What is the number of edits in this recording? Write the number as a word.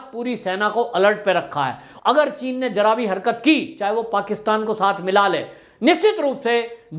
one